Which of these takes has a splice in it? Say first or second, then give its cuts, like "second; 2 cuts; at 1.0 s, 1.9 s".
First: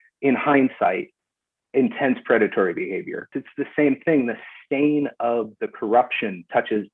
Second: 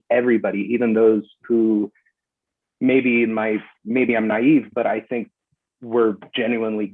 first; 1 cut; at 3.4 s